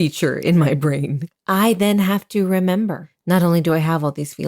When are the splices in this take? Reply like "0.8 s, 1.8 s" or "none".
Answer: 1.2 s, 3.1 s